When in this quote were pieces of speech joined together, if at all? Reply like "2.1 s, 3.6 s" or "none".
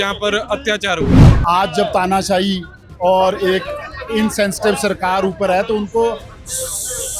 1.3 s